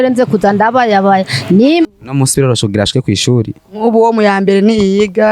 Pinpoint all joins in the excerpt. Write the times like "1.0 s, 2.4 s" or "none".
1.9 s